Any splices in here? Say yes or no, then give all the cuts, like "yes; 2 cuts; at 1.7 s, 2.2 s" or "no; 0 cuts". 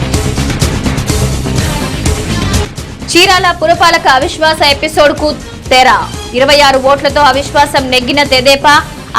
yes; 1 cut; at 1.9 s